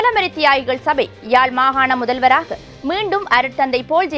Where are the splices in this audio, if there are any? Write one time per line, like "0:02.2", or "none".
none